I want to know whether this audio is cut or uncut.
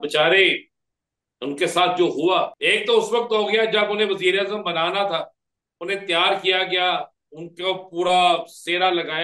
cut